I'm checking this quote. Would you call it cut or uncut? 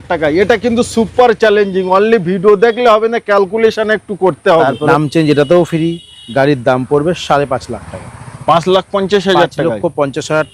cut